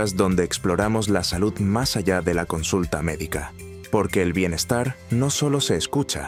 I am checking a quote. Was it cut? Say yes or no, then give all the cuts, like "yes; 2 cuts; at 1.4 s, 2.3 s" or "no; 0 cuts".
no; 0 cuts